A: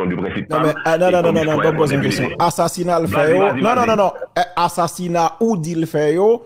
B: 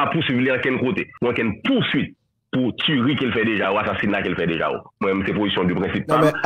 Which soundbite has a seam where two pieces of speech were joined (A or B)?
B